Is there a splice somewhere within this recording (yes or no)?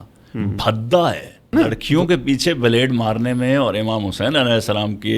yes